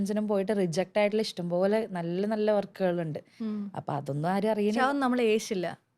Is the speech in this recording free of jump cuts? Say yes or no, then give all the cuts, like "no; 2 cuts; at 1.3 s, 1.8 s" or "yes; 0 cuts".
yes; 0 cuts